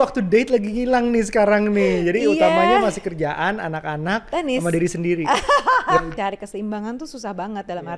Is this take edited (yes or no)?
yes